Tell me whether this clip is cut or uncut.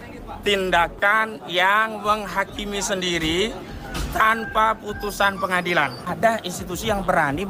cut